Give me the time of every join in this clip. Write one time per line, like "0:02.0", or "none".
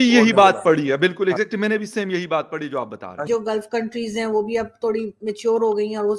0:03.3